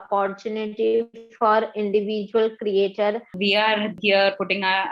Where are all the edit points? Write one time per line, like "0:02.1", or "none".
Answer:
0:03.3